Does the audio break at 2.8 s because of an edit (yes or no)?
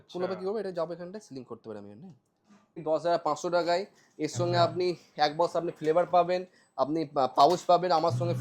yes